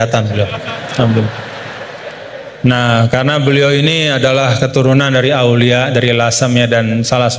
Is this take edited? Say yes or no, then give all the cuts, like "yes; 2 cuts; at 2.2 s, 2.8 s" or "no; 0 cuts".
no; 0 cuts